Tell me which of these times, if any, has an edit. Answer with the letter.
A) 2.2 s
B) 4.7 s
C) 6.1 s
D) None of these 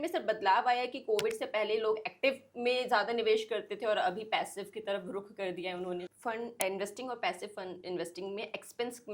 C